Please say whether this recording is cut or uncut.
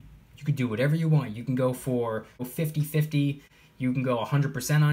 cut